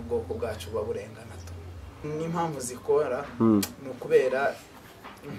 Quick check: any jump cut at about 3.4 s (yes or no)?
no